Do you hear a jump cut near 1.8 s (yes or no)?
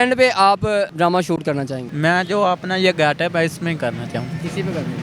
yes